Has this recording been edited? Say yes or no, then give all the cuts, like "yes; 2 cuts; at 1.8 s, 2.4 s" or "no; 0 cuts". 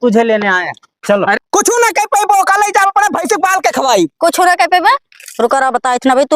yes; 1 cut; at 1.4 s